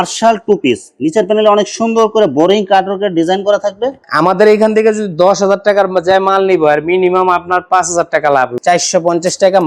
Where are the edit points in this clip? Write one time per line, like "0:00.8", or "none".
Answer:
0:04.0
0:08.5